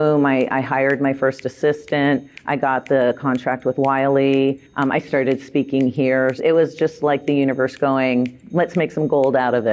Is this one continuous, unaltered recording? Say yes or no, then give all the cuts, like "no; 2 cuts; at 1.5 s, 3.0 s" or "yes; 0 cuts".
no; 2 cuts; at 6.4 s, 8.4 s